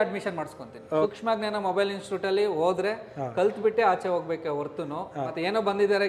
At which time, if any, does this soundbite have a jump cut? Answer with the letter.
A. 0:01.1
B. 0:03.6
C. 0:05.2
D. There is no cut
A